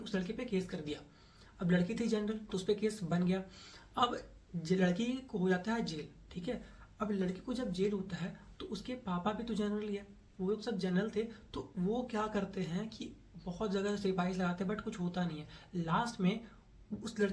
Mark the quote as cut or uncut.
uncut